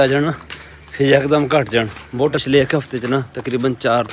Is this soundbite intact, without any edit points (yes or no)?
no